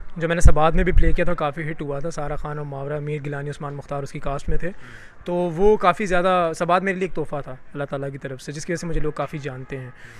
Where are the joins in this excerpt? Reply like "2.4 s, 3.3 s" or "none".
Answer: none